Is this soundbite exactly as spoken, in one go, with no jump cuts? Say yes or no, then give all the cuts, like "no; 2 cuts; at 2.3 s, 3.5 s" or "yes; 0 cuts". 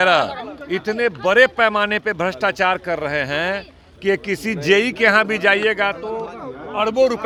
yes; 0 cuts